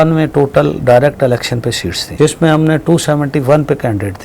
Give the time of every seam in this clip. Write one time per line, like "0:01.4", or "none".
0:02.1